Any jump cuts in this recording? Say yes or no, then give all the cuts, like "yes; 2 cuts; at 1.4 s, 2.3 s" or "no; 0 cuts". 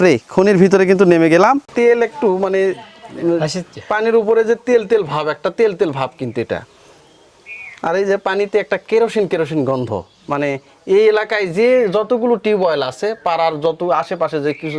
yes; 1 cut; at 1.7 s